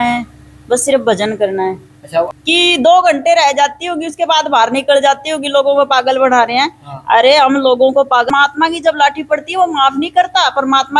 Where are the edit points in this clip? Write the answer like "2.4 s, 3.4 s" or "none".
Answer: 2.3 s, 8.3 s